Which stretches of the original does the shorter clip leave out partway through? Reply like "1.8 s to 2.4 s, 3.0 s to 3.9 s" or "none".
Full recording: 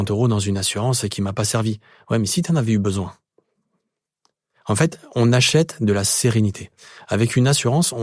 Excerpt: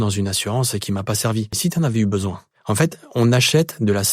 1.9 s to 2.3 s, 3.2 s to 4.5 s

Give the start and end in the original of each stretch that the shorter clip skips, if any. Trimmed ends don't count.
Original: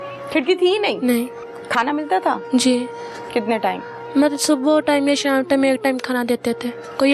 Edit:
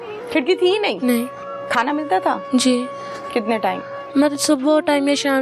none

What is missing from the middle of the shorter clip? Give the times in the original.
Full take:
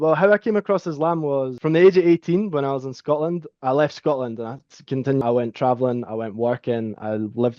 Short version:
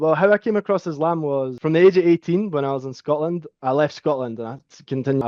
none

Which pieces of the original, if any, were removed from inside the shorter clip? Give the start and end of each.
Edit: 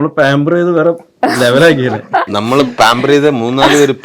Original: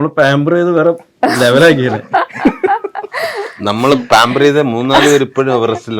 2.3 s to 3.6 s

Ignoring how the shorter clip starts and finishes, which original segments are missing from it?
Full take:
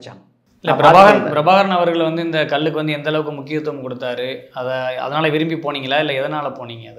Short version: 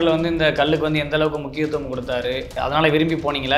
4.5 s to 5.0 s

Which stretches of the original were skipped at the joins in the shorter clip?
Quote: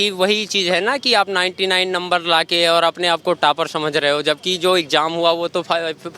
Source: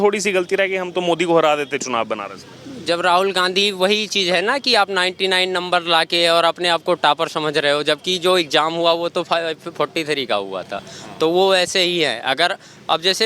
none

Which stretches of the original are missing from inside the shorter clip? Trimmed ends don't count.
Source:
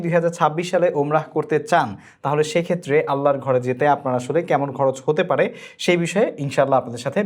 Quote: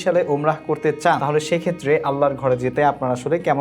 1.9 s to 2.2 s

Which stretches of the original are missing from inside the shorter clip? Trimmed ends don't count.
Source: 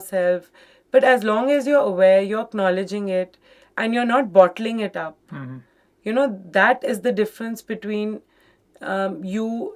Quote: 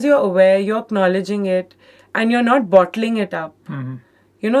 none

